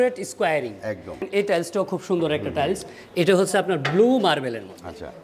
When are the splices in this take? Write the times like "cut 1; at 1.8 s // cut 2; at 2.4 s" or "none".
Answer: cut 1; at 1.2 s